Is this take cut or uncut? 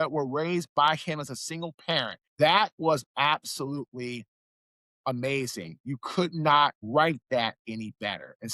cut